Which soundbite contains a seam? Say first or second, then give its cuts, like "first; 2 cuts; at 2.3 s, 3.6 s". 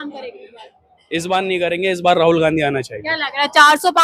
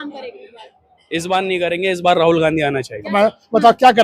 second; 1 cut; at 3.0 s